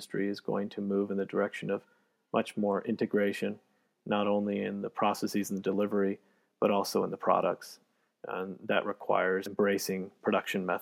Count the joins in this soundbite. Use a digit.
1